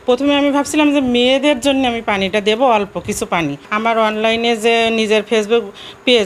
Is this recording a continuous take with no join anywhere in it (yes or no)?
no